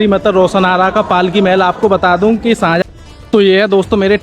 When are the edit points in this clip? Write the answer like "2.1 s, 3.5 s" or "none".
2.8 s